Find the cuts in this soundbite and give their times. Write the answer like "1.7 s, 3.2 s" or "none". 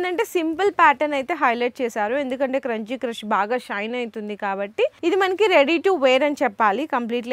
5.0 s